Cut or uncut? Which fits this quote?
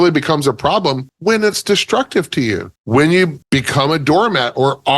cut